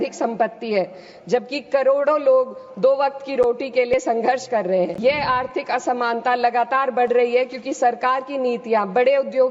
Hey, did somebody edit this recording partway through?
yes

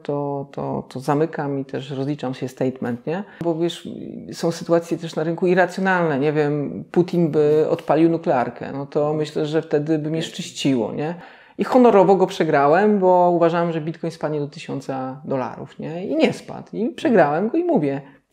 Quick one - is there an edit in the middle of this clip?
yes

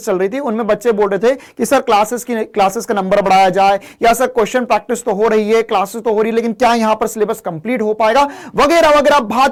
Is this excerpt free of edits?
yes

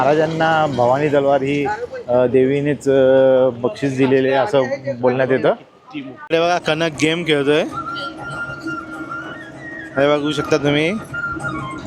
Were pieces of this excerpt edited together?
yes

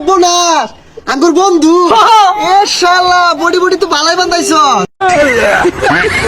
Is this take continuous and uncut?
no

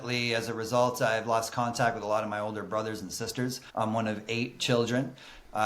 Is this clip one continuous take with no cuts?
no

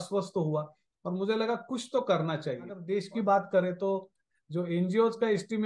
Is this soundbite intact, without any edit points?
no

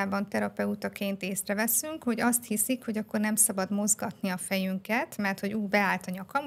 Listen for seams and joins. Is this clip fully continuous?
yes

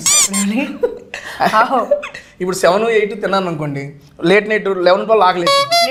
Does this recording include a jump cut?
no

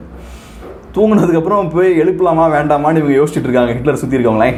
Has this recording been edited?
no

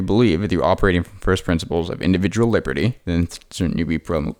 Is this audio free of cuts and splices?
yes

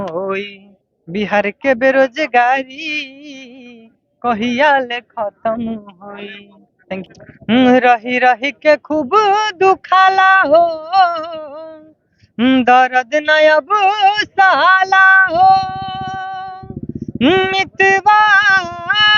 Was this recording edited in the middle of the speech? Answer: yes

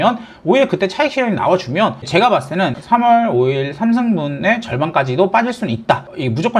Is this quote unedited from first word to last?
no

